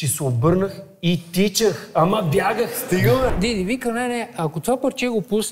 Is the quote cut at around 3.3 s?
yes; 1 cut; at 3.3 s

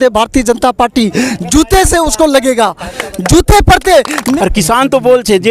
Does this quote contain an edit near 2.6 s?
no; 1 cut; at 4.1 s

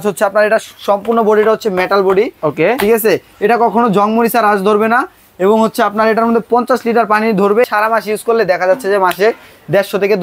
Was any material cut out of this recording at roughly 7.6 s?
yes; 1 cut; at 7.6 s

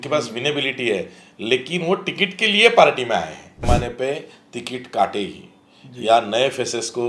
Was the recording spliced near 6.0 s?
no; 1 cut; at 3.6 s

